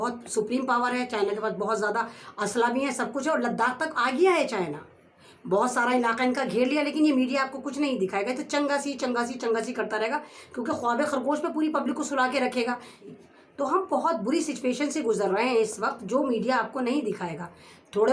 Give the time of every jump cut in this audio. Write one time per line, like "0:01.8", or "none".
0:13.0